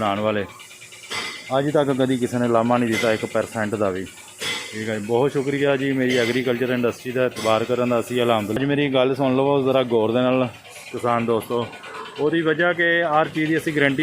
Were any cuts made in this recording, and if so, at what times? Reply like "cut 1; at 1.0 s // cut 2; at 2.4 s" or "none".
cut 1; at 8.6 s